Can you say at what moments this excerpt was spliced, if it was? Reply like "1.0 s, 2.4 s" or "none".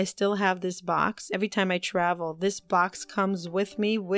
1.3 s